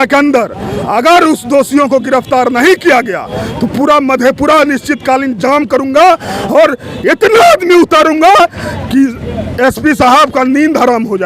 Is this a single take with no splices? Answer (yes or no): yes